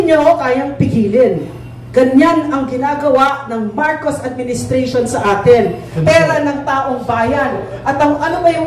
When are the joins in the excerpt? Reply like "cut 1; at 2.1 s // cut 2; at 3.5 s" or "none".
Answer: cut 1; at 5.9 s